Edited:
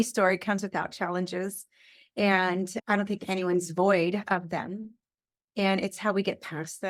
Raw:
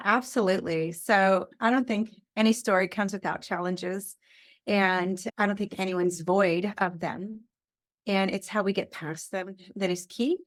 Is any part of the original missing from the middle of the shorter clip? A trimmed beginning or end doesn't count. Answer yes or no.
no